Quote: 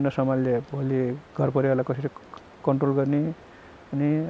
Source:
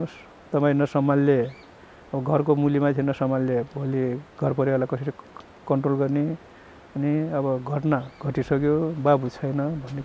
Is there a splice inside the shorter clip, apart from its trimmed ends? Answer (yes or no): no